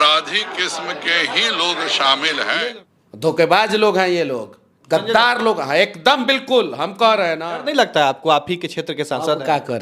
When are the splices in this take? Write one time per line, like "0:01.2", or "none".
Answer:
0:02.7
0:07.5